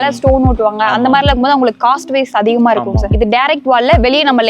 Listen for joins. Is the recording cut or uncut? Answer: cut